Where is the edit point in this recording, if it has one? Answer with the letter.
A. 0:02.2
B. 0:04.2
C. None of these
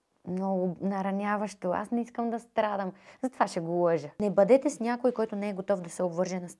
B